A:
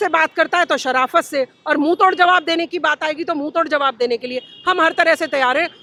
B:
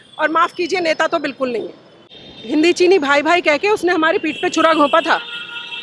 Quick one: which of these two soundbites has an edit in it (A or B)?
B